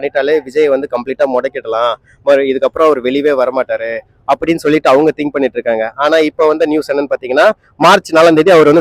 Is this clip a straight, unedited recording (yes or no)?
yes